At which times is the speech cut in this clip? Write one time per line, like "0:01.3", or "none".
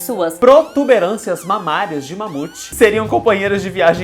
0:02.7